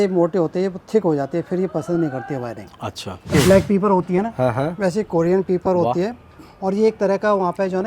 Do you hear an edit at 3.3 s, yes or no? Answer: yes